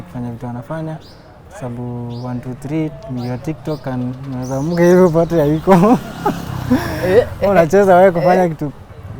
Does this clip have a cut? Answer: no; 0 cuts

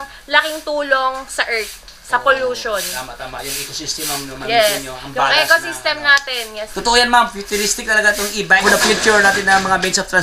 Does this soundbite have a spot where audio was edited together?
yes; 2 cuts; at 6.7 s, 8.6 s

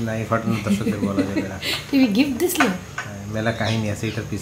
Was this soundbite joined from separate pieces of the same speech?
no; 0 cuts

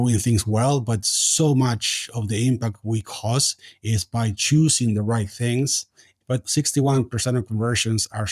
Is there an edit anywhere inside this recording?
yes; 1 cut; at 6.3 s

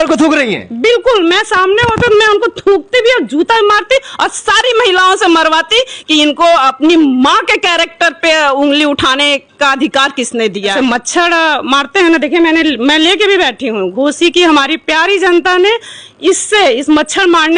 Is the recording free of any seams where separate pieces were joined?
no; 1 cut; at 10.7 s

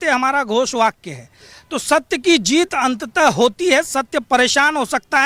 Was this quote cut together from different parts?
no; 0 cuts

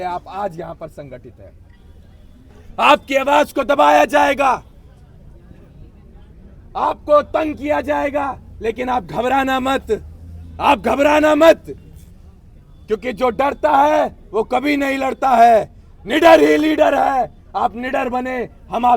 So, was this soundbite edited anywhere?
no; 0 cuts

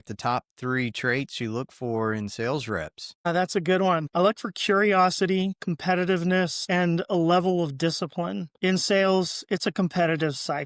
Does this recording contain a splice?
yes; 1 cut; at 8.4 s

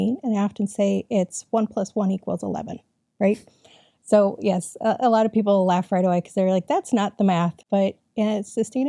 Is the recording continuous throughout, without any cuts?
no; 1 cut; at 7.6 s

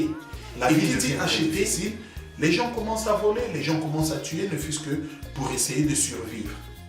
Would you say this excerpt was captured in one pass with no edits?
no; 1 cut; at 1.7 s

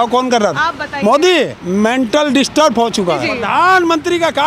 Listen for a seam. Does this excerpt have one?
yes; 2 cuts; at 1.6 s, 3.3 s

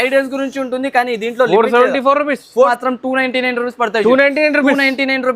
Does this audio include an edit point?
yes; 1 cut; at 2.7 s

